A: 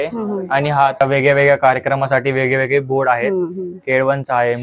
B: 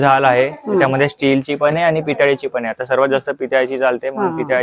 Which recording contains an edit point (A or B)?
A